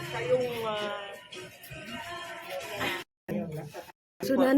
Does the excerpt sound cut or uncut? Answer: cut